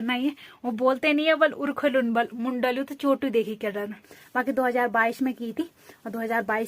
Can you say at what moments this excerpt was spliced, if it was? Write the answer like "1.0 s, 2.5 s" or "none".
4.2 s